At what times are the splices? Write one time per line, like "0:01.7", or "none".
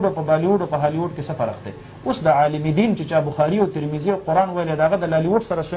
none